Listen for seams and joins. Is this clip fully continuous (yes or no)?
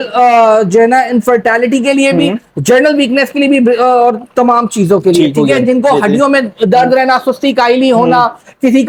yes